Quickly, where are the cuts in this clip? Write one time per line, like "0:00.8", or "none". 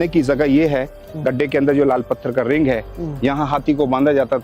none